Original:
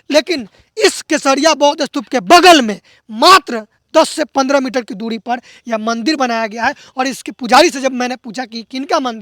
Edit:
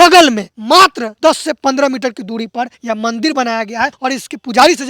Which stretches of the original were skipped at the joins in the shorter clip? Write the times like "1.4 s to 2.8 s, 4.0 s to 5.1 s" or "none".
3.1 s to 3.5 s, 5.5 s to 5.6 s, 6.8 s to 6.9 s